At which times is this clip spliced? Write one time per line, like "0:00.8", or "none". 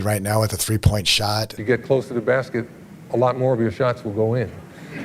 0:01.5